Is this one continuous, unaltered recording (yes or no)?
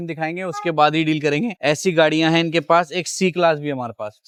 yes